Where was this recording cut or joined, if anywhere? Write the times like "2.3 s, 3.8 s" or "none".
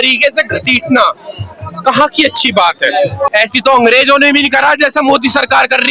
3.3 s